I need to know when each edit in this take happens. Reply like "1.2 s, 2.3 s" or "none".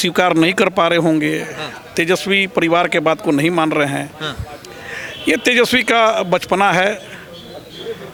none